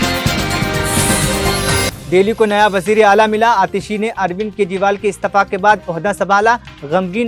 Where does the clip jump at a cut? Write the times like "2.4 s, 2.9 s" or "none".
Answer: 1.9 s